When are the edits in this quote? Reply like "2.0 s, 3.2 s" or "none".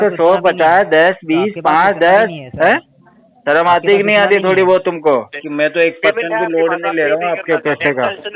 5.4 s